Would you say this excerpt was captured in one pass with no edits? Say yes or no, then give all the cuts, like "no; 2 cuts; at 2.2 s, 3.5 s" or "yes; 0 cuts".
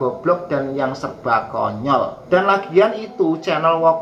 no; 1 cut; at 2.2 s